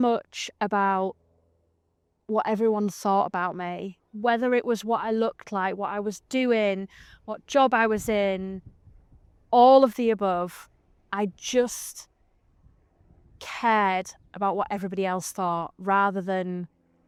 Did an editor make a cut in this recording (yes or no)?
no